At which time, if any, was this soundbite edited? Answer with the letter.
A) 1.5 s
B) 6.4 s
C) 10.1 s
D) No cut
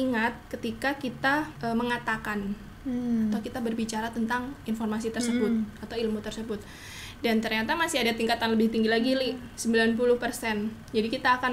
A